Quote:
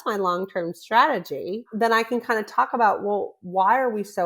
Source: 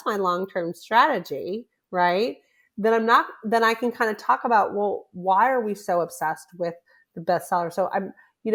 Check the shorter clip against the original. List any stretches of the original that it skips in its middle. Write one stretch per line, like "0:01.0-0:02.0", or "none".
0:01.7-0:03.4